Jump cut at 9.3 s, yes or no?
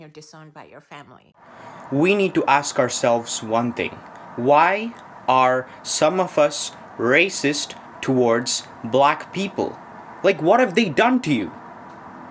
no